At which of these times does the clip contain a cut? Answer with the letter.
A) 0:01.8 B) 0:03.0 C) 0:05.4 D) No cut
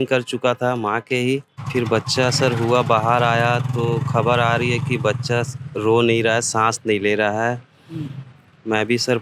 A